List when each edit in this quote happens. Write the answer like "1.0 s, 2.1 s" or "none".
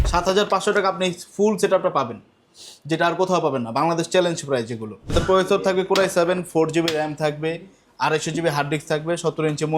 5.1 s